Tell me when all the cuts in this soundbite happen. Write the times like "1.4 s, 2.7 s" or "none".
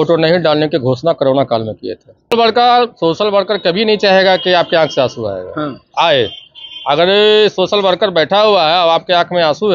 2.3 s